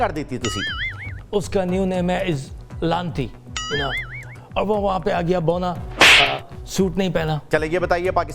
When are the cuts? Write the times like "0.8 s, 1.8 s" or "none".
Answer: 1.1 s, 4.2 s, 7.4 s